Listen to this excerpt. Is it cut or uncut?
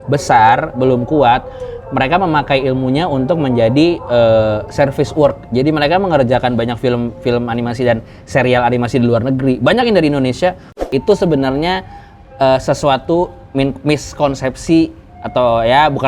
cut